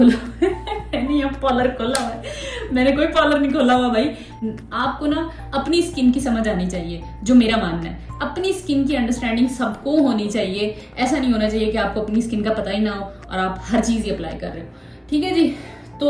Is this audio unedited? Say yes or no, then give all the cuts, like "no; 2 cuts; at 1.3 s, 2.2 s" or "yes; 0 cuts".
yes; 0 cuts